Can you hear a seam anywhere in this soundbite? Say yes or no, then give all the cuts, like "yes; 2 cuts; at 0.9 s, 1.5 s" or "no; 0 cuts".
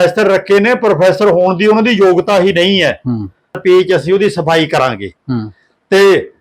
yes; 1 cut; at 3.6 s